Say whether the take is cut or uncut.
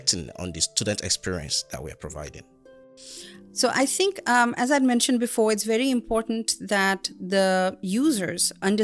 uncut